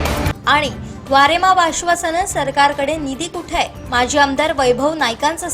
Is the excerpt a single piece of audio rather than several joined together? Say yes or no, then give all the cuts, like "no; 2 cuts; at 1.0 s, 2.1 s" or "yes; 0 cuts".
yes; 0 cuts